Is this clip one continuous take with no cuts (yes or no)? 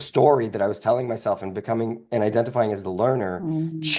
yes